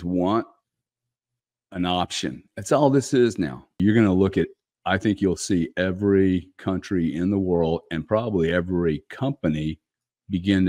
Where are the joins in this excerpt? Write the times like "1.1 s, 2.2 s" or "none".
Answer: 3.8 s